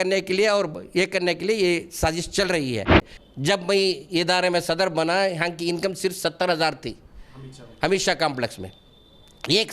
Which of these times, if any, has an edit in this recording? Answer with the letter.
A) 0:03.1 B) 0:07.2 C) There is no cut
A